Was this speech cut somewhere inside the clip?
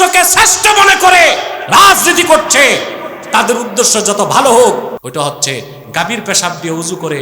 yes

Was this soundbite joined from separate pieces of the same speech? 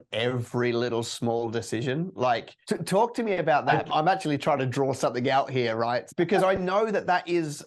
yes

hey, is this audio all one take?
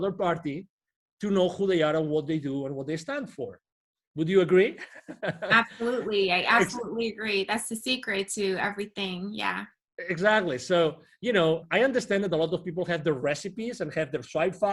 yes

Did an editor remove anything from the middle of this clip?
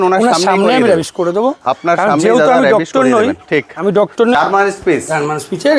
yes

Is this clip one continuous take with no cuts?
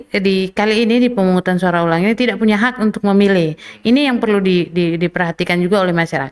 yes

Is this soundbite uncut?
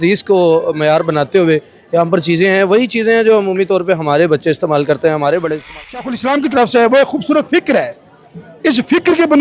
no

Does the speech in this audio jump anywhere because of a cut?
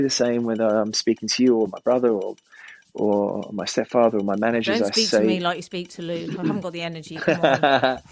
no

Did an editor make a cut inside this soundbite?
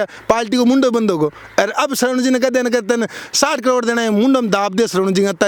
no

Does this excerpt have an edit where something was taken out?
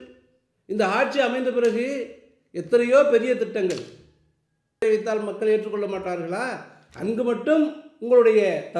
yes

